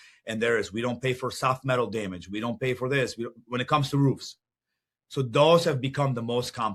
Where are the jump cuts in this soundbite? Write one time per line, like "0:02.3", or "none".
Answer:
none